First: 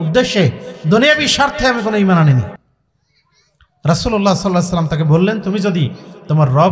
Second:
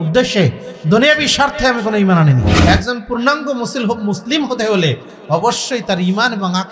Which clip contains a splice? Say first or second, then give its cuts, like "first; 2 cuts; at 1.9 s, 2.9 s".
second; 1 cut; at 2.5 s